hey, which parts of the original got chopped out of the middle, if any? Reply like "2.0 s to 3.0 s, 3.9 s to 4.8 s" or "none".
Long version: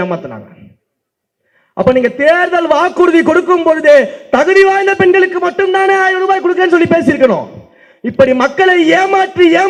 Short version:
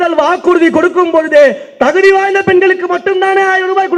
none